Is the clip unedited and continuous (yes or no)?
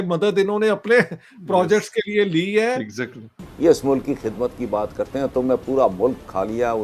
no